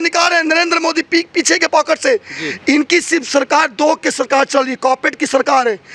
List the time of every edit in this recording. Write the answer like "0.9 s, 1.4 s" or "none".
none